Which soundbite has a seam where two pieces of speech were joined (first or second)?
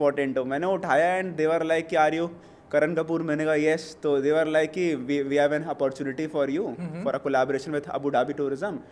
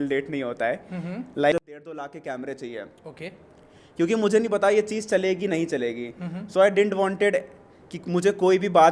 second